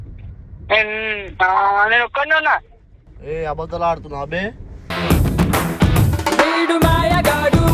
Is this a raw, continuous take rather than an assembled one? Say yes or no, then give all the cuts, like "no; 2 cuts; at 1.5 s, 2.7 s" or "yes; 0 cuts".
yes; 0 cuts